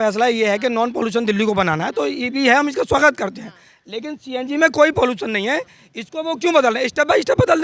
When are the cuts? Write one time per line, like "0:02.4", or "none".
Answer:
none